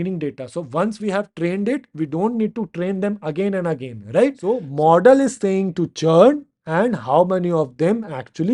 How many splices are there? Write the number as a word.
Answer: one